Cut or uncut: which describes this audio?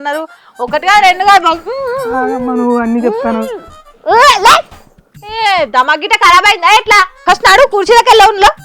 cut